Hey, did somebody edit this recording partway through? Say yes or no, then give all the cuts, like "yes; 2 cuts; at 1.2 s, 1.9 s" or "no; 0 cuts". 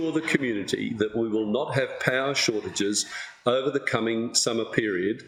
no; 0 cuts